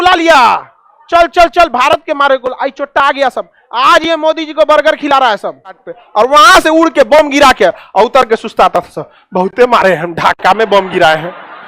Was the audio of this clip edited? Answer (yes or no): yes